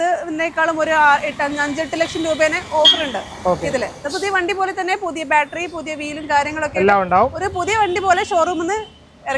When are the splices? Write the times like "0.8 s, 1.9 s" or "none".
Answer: none